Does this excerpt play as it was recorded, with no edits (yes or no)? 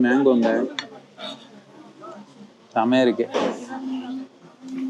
yes